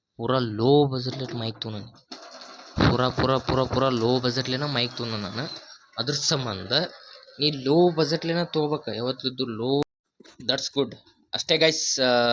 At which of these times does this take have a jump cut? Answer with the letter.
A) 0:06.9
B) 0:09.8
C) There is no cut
B